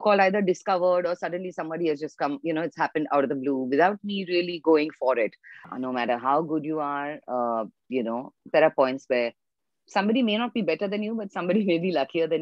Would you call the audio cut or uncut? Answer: cut